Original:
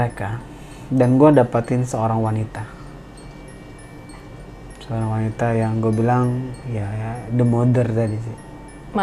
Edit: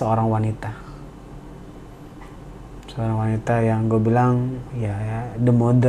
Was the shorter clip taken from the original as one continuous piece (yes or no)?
yes